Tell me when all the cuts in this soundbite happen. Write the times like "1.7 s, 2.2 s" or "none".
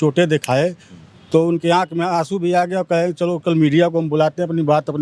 none